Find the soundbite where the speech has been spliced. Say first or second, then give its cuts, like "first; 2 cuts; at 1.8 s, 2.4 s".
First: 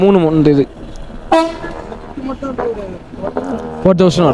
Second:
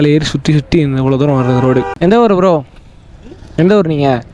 second; 1 cut; at 1.9 s